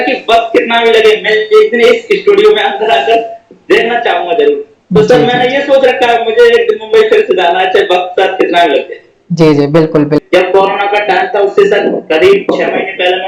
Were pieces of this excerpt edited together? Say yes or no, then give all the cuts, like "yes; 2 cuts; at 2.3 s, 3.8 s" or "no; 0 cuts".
yes; 1 cut; at 10.2 s